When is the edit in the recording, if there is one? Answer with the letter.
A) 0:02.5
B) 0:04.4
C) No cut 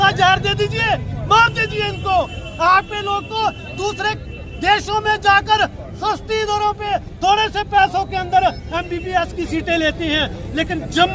C